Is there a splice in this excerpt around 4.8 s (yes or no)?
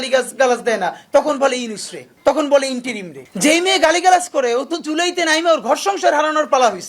no